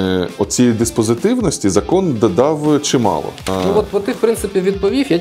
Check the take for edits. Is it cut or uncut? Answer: cut